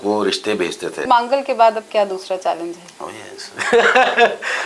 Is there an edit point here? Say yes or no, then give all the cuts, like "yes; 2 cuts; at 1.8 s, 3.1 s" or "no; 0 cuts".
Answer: yes; 1 cut; at 1.0 s